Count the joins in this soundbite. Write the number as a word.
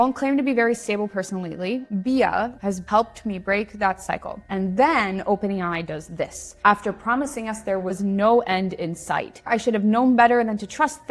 two